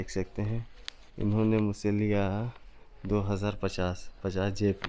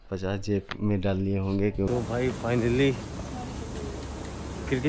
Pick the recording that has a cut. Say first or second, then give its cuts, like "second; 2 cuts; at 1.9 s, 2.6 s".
second; 1 cut; at 1.9 s